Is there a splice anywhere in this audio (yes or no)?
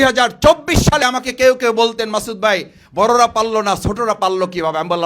yes